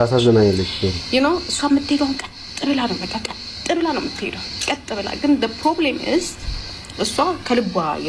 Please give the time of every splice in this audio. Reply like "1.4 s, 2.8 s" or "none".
none